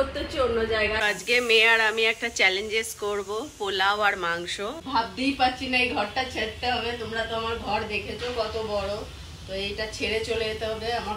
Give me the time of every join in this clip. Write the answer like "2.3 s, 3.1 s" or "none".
1.0 s, 4.8 s